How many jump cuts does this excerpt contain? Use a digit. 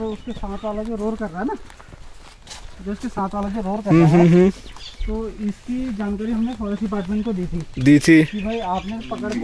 0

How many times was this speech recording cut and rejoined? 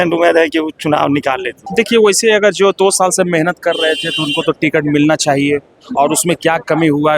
1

